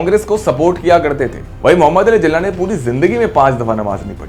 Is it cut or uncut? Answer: cut